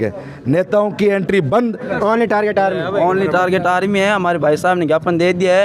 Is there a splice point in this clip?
yes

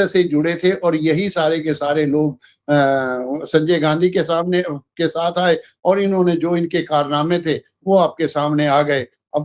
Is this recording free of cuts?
yes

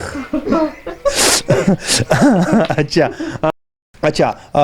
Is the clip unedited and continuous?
no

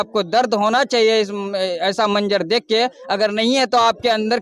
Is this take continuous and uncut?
yes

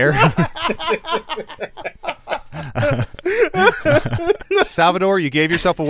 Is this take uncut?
no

